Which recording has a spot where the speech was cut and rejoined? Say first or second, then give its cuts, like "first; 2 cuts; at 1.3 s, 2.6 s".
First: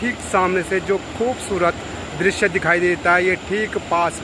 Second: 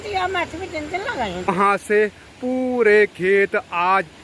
second; 1 cut; at 1.5 s